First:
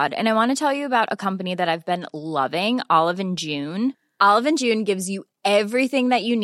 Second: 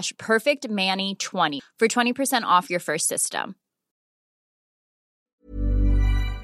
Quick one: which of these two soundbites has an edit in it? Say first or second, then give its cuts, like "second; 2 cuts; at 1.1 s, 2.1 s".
second; 1 cut; at 1.6 s